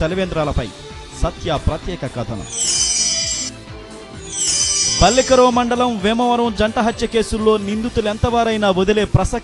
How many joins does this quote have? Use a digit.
2